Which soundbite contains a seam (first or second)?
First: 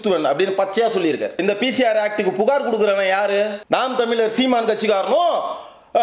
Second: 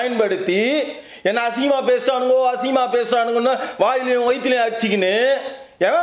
first